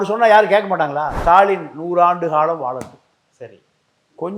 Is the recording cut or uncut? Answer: cut